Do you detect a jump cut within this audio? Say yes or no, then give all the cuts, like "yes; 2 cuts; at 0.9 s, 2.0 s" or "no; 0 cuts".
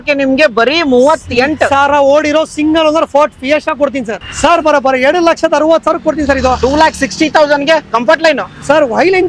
yes; 1 cut; at 4.2 s